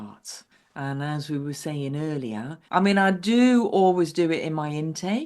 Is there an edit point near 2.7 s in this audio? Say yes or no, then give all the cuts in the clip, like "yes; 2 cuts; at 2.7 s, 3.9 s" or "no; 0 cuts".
yes; 1 cut; at 2.7 s